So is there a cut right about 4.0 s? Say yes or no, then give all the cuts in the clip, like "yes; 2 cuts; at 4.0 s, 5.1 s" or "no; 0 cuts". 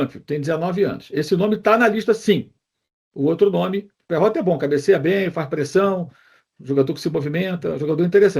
yes; 1 cut; at 4.0 s